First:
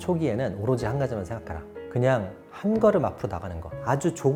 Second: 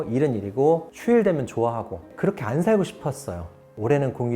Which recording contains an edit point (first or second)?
second